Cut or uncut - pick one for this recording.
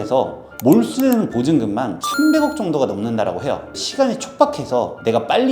cut